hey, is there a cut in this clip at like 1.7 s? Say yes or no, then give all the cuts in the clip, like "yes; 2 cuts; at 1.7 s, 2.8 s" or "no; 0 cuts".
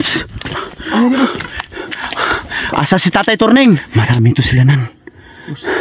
no; 1 cut; at 3.9 s